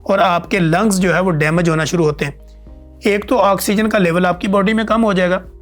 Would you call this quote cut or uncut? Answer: uncut